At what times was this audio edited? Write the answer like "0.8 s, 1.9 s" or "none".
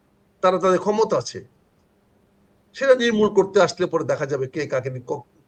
none